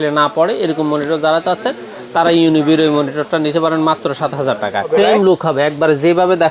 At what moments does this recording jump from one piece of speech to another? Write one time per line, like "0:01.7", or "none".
0:04.9